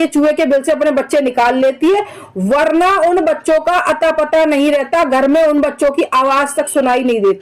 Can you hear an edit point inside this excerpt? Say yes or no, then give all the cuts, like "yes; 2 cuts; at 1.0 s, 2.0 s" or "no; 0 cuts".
no; 0 cuts